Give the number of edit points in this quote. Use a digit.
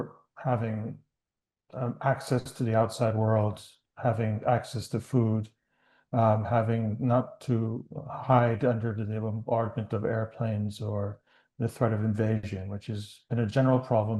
0